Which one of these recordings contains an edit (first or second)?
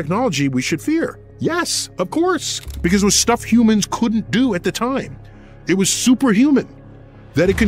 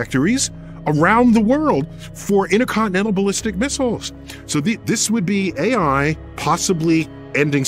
first